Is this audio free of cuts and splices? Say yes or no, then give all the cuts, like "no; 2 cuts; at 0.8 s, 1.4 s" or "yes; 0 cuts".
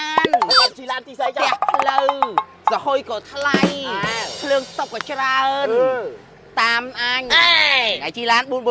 yes; 0 cuts